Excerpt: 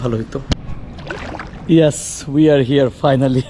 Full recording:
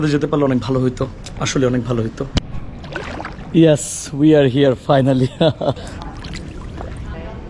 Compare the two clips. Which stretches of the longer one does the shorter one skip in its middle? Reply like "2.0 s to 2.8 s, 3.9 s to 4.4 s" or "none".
none